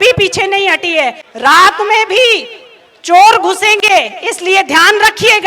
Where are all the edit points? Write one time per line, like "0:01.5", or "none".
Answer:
0:01.2